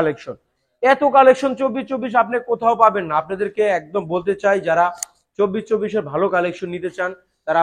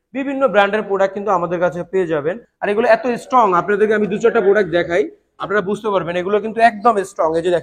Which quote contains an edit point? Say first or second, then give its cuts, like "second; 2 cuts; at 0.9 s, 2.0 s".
second; 1 cut; at 2.5 s